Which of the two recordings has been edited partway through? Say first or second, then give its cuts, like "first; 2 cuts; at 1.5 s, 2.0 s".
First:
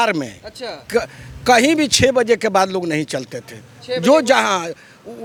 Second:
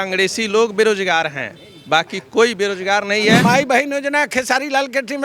second; 1 cut; at 3.4 s